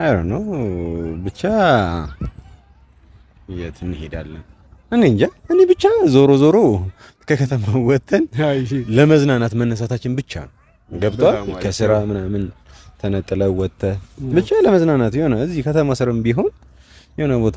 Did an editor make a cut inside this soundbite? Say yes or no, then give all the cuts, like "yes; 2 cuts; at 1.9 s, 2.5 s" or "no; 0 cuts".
no; 0 cuts